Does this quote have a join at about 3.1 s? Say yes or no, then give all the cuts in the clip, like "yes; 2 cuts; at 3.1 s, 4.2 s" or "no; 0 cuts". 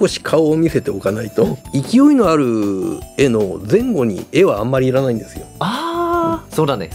no; 1 cut; at 1.6 s